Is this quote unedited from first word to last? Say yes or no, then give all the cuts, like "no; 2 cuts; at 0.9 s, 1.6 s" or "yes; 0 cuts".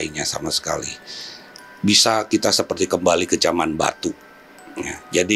yes; 0 cuts